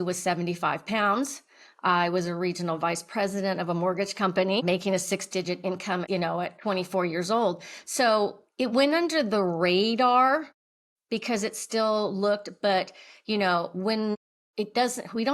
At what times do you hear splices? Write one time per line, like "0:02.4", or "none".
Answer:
0:06.0